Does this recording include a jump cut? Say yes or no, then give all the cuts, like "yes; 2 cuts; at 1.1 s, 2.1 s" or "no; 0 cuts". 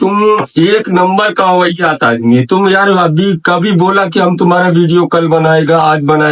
no; 0 cuts